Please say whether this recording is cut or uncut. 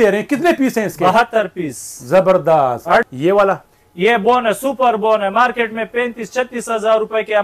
cut